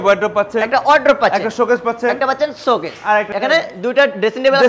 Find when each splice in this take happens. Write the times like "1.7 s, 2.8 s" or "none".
none

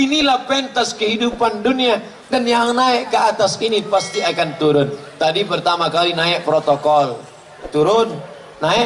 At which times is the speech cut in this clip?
none

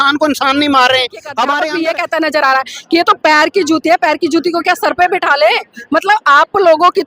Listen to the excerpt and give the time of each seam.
1.3 s

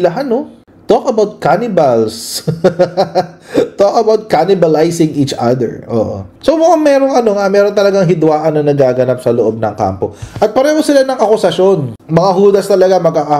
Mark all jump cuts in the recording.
6.2 s, 12.0 s

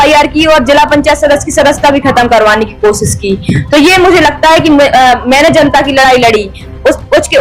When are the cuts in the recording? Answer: none

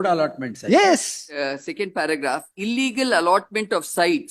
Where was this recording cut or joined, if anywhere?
1.2 s

